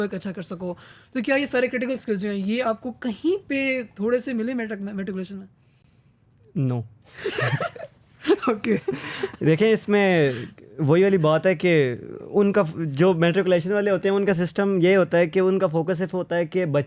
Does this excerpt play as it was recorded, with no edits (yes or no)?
yes